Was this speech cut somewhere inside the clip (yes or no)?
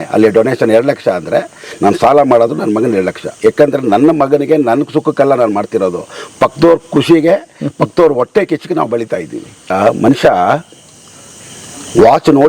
yes